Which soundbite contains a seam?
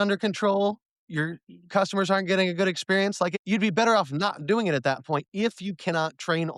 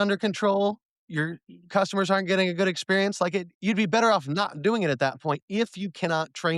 first; 1 cut; at 3.4 s

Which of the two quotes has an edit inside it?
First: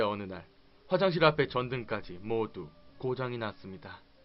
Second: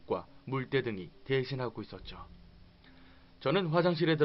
second; 1 cut; at 2.7 s

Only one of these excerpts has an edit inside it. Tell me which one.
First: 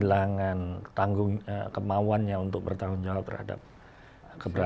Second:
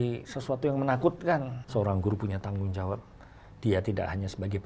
second; 1 cut; at 1.6 s

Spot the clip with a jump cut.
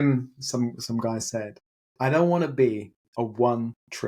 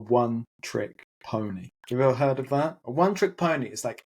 second; 2 cuts; at 1.7 s, 2.8 s

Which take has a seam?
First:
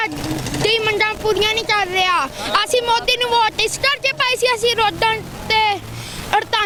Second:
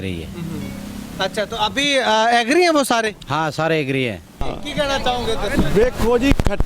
second; 1 cut; at 4.4 s

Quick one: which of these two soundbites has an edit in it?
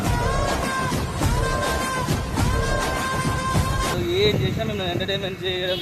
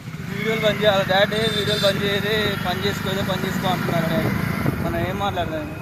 first; 1 cut; at 3.9 s

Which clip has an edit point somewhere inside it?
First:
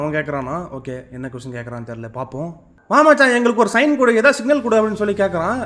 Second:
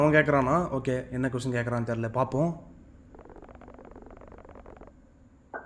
first; 1 cut; at 2.7 s

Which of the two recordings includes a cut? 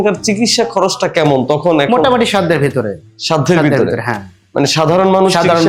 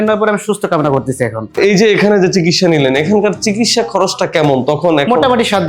second; 1 cut; at 1.6 s

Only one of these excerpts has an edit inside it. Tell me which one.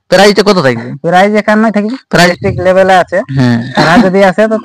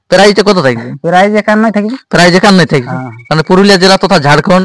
first; 1 cut; at 2.3 s

